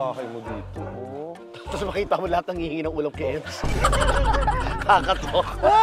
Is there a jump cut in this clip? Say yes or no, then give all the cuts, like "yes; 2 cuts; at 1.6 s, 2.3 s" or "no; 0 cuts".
no; 0 cuts